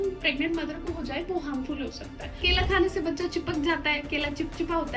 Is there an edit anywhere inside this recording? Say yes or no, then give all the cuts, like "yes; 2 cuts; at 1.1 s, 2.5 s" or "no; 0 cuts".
yes; 1 cut; at 2.4 s